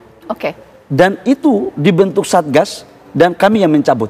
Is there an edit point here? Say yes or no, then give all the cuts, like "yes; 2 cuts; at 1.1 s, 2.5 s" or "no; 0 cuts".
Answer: no; 0 cuts